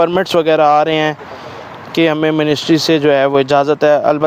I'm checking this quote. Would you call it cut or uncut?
uncut